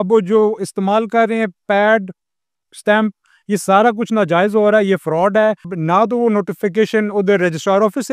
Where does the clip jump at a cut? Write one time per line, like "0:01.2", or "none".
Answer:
0:05.7